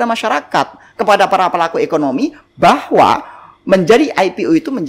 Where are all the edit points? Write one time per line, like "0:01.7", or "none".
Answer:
none